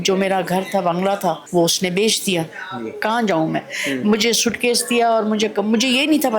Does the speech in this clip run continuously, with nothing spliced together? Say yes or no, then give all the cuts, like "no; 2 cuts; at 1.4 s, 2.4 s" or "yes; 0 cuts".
no; 2 cuts; at 1.4 s, 3.0 s